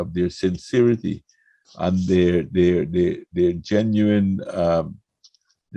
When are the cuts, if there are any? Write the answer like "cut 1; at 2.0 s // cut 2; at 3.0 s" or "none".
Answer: none

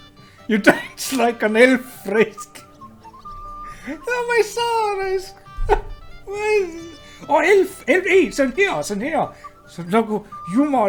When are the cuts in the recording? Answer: none

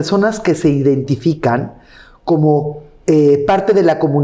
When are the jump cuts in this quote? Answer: none

